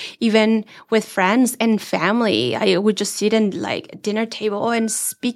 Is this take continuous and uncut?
yes; 0 cuts

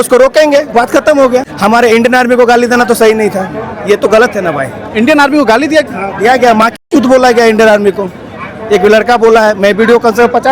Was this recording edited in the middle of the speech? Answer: yes; 1 cut; at 1.5 s

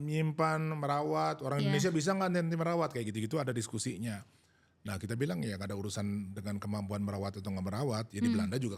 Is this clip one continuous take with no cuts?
yes; 0 cuts

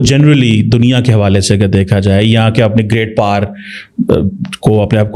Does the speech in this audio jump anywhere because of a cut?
no; 0 cuts

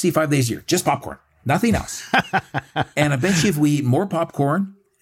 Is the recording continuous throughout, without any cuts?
yes; 0 cuts

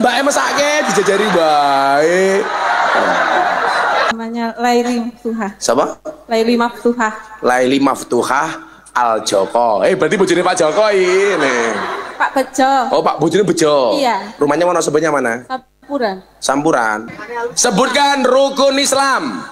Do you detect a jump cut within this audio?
yes; 2 cuts; at 4.1 s, 17.1 s

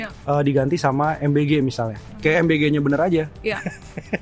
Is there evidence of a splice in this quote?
yes; 1 cut; at 2.1 s

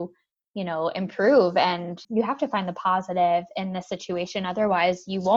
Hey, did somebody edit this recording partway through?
yes; 1 cut; at 2.0 s

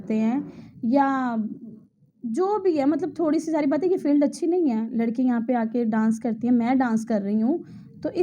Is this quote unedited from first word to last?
yes; 0 cuts

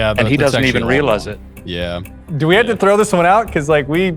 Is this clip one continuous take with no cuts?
no; 1 cut; at 2.2 s

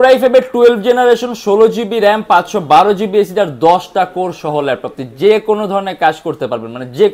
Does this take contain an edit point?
no; 0 cuts

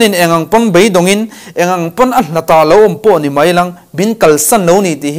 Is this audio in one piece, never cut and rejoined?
yes; 0 cuts

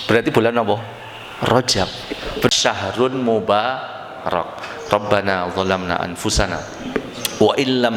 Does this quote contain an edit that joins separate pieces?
yes; 1 cut; at 2.5 s

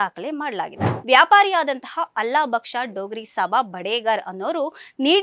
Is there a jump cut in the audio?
yes; 1 cut; at 0.9 s

